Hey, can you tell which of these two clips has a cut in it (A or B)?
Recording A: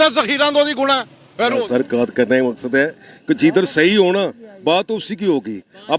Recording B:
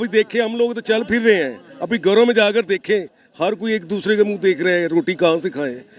A